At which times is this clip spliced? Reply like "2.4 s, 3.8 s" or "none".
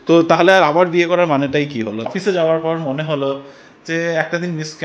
2.1 s